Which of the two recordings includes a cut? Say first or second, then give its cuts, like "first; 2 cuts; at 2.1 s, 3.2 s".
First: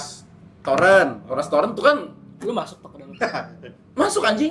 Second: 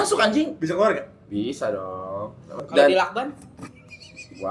second; 1 cut; at 2.6 s